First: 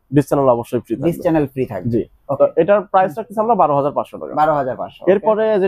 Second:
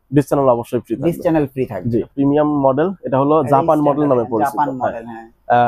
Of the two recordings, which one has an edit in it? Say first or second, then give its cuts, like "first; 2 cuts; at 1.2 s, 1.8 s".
second; 1 cut; at 2.1 s